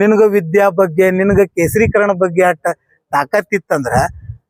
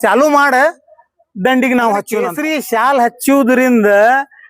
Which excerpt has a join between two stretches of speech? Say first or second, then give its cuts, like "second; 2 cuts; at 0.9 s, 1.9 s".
second; 1 cut; at 2.4 s